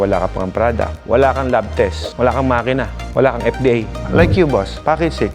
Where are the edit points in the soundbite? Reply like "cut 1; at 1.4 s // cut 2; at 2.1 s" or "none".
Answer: cut 1; at 4.0 s